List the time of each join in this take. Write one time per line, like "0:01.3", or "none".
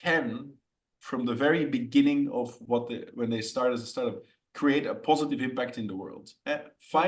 none